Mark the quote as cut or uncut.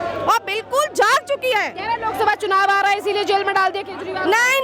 uncut